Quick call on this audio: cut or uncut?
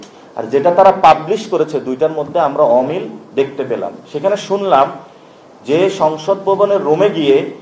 uncut